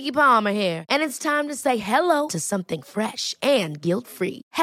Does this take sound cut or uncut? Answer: uncut